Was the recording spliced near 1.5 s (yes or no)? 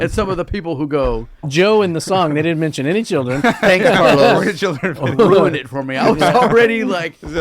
yes